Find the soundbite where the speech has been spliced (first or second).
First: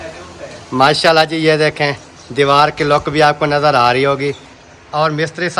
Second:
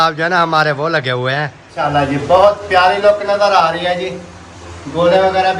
second